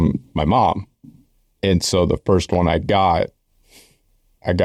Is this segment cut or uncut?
uncut